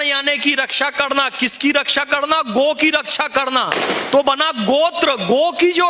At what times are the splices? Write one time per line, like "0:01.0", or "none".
none